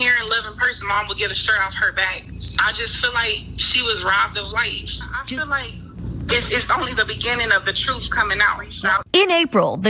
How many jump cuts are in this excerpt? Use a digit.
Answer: 2